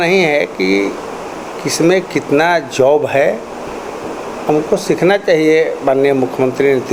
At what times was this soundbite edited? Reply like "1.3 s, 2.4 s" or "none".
none